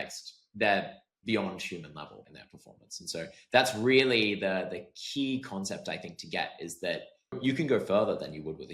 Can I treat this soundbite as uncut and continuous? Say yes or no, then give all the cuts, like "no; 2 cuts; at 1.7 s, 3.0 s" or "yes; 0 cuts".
no; 2 cuts; at 2.3 s, 7.4 s